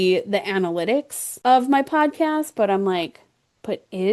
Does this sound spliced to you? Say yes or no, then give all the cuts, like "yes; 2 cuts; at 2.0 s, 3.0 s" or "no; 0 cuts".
yes; 1 cut; at 1.2 s